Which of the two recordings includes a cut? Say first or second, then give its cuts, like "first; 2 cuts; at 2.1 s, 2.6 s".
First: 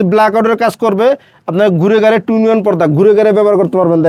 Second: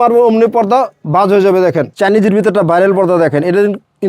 second; 1 cut; at 2.0 s